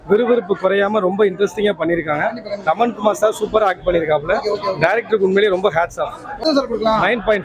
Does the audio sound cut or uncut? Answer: cut